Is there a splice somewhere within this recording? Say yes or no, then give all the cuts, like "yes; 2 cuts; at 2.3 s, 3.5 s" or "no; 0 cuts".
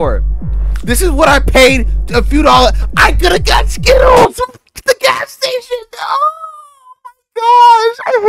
no; 0 cuts